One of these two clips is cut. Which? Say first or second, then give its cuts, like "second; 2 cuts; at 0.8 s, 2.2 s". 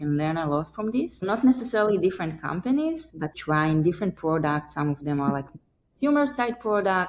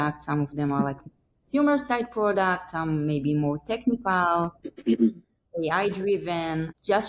first; 2 cuts; at 1.2 s, 3.4 s